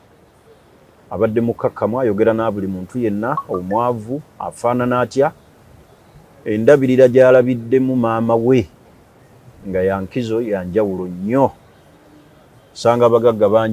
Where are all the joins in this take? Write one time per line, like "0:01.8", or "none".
none